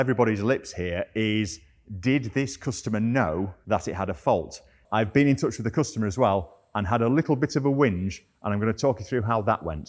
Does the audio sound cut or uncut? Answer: cut